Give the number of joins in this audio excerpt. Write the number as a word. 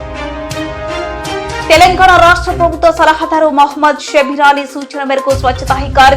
one